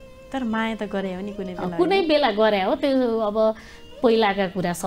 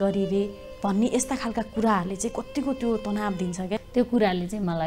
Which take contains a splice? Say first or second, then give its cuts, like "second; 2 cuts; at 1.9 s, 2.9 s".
second; 1 cut; at 3.9 s